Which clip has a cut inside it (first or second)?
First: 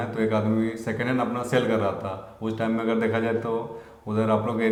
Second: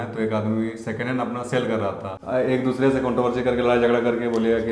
second